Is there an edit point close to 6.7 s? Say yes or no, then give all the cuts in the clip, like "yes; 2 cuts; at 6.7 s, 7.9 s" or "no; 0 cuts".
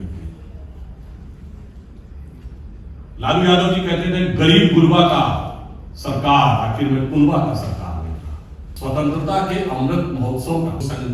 no; 1 cut; at 8.7 s